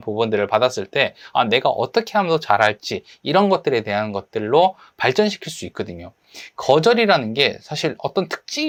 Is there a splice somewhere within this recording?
no; 0 cuts

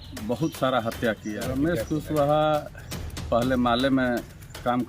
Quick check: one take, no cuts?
no; 1 cut; at 1.3 s

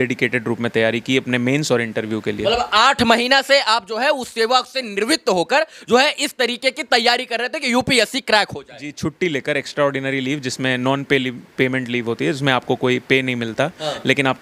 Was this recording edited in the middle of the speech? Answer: no; 0 cuts

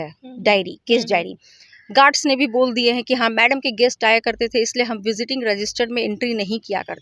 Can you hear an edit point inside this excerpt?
no; 0 cuts

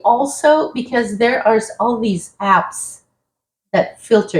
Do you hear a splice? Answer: no; 0 cuts

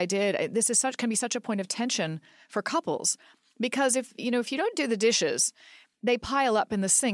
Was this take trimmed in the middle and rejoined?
no; 0 cuts

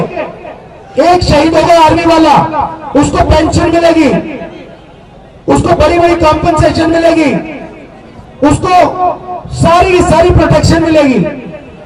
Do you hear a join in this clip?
no; 0 cuts

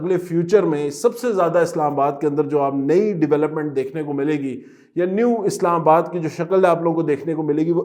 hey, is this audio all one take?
yes; 0 cuts

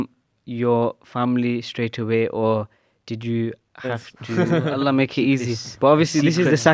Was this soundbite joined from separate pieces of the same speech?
yes; 1 cut; at 4.4 s

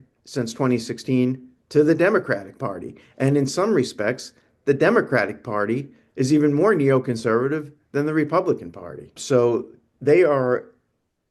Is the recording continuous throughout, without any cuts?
no; 1 cut; at 9.2 s

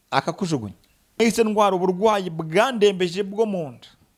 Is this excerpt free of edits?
no; 1 cut; at 1.2 s

